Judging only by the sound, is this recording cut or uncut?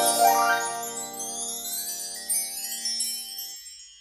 uncut